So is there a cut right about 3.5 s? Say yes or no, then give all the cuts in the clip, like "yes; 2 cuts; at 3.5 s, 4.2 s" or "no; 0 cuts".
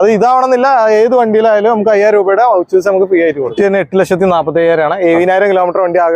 yes; 1 cut; at 3.5 s